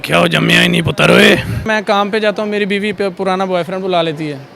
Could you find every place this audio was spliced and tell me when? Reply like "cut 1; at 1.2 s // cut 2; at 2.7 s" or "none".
cut 1; at 1.7 s